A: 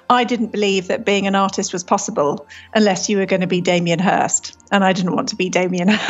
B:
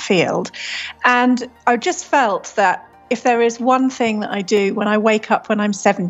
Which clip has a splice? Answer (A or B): B